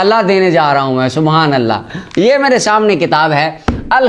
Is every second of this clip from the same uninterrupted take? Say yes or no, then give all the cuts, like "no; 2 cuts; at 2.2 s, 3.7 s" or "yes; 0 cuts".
yes; 0 cuts